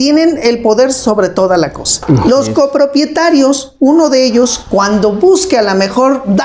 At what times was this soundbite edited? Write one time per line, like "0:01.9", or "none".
0:01.9